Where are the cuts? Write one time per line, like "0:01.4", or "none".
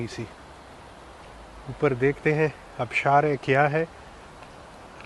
none

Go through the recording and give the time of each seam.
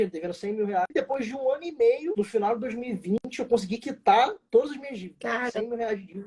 0:00.9
0:02.1

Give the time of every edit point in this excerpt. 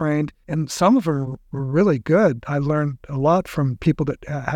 none

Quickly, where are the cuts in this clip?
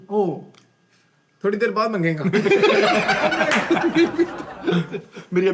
0:04.5

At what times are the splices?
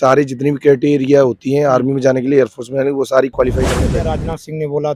0:03.8

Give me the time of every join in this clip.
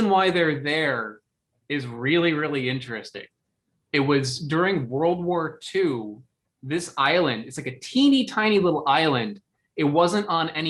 0:03.8

